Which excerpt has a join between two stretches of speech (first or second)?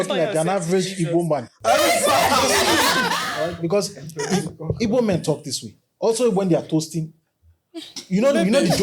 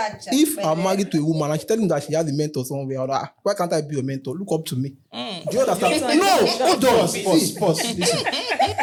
first